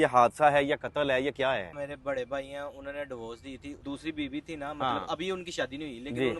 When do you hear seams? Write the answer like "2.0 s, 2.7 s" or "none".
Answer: 1.7 s, 3.8 s